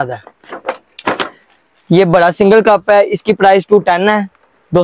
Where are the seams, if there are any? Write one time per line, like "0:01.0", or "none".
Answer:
none